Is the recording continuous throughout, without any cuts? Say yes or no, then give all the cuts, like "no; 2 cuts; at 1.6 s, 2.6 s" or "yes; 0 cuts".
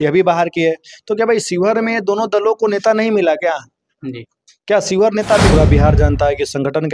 no; 1 cut; at 5.5 s